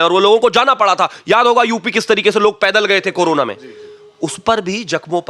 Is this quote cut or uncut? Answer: uncut